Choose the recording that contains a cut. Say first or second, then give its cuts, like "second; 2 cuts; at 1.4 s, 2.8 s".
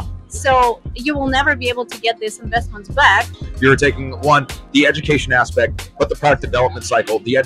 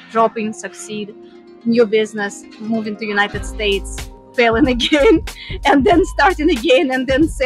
first; 1 cut; at 3.4 s